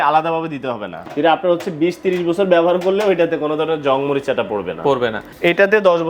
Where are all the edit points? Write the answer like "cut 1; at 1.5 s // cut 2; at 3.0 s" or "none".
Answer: cut 1; at 1.1 s // cut 2; at 5.3 s